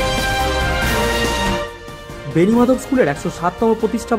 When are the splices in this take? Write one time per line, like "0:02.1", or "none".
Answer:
none